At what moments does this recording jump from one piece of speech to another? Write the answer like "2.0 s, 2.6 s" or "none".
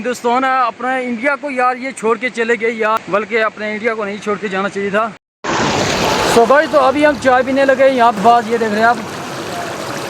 5.0 s, 8.2 s